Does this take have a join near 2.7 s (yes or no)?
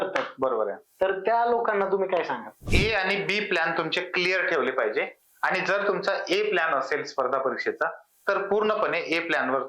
yes